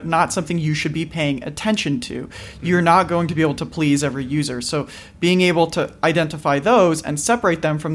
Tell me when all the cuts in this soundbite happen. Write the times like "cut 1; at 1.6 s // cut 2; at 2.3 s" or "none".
none